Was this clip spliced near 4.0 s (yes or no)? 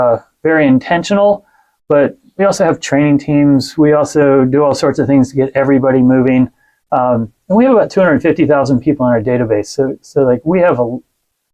no